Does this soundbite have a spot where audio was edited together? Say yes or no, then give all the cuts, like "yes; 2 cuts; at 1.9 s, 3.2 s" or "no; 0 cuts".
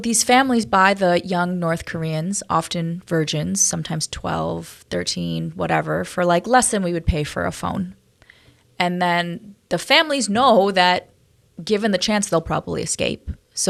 no; 0 cuts